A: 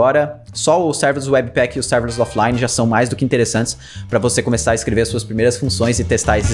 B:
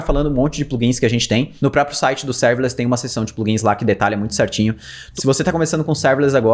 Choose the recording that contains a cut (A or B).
B